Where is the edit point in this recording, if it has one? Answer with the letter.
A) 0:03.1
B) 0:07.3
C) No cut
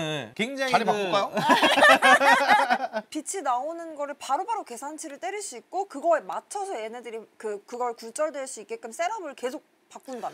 A